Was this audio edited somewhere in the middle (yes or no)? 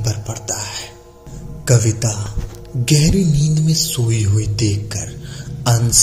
yes